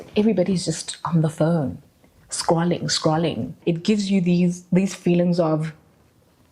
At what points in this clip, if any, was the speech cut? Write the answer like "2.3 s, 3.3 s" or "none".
3.6 s